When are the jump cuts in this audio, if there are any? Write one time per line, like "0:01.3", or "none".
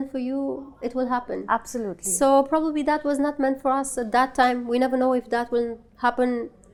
none